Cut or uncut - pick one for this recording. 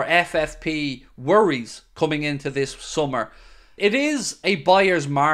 cut